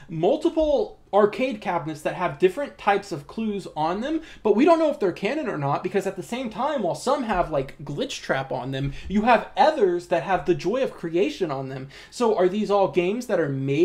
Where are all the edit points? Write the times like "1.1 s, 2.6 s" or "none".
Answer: 1.0 s